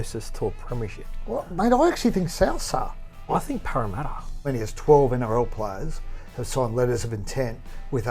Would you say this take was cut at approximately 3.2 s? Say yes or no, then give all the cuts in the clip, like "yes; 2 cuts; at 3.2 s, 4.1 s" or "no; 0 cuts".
yes; 2 cuts; at 3.2 s, 4.3 s